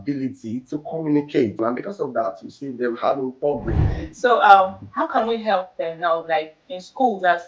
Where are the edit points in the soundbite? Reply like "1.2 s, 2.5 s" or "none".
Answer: 1.6 s, 3.9 s